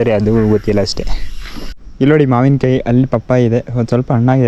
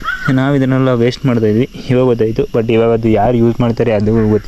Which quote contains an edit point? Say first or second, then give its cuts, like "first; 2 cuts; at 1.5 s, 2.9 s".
first; 1 cut; at 1.8 s